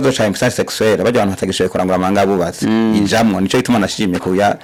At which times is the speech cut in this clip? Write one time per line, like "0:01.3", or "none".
none